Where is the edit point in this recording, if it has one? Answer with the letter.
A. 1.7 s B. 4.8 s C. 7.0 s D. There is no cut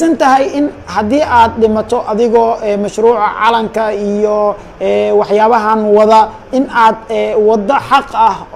D